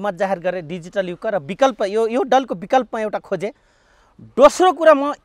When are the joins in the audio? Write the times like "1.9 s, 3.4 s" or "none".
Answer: none

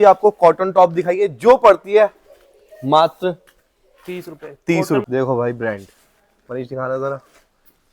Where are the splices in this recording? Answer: 5.0 s

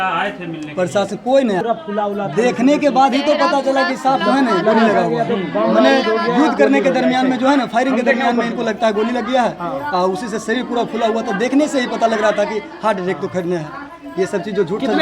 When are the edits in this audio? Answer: 1.6 s

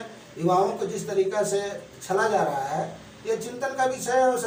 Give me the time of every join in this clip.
none

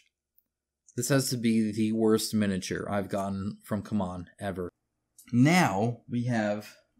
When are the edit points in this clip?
4.7 s

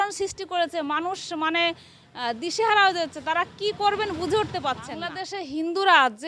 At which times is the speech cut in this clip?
4.9 s

